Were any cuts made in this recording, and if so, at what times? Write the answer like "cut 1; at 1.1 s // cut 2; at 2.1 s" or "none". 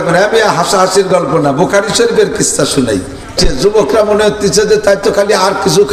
cut 1; at 3.4 s